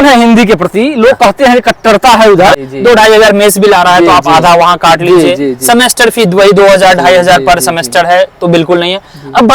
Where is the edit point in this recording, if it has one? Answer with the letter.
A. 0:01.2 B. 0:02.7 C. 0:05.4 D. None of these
B